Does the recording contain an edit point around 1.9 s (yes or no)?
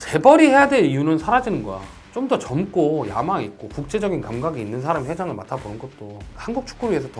yes